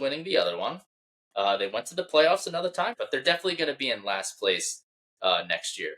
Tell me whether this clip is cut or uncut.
cut